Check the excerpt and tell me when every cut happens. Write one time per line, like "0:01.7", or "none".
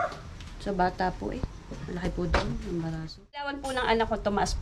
0:03.6